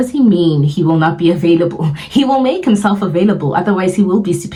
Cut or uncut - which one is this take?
uncut